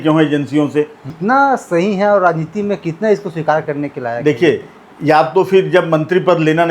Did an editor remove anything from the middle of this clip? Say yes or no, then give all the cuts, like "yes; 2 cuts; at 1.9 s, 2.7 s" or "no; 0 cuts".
yes; 1 cut; at 1.1 s